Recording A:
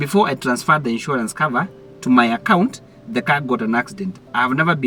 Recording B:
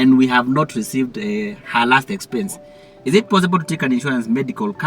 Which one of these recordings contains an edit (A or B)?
B